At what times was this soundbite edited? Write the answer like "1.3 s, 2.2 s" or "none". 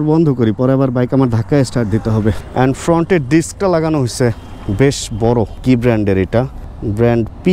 2.4 s